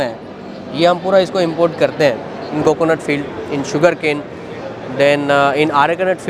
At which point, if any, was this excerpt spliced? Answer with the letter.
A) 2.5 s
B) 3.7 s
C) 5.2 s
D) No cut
A